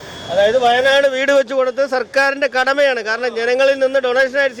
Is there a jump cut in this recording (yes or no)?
no